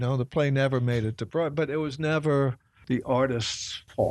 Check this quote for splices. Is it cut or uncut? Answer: cut